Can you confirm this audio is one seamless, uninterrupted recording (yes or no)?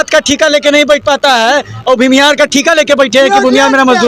yes